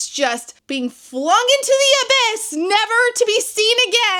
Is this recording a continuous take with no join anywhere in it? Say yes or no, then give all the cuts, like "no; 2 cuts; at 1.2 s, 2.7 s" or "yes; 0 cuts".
yes; 0 cuts